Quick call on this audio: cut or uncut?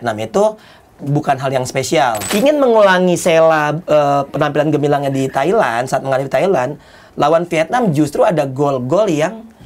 cut